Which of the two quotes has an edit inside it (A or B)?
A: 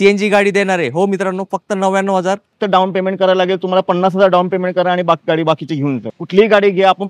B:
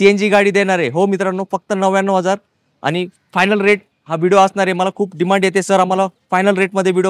A